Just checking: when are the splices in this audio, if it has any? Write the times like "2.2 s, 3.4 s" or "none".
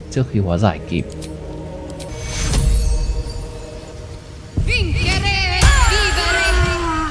2.1 s, 3.9 s